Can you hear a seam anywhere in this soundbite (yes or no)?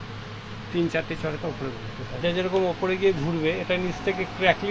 yes